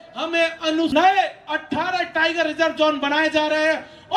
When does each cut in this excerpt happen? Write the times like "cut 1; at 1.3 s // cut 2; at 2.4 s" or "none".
cut 1; at 0.9 s